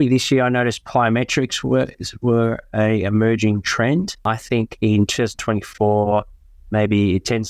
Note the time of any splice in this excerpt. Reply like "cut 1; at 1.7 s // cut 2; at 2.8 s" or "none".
cut 1; at 4.2 s